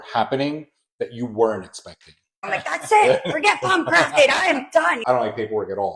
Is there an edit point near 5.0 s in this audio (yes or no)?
yes